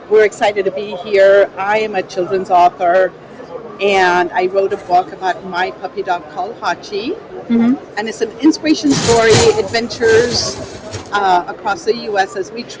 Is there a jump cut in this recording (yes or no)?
no